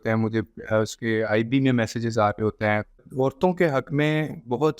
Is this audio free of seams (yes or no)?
no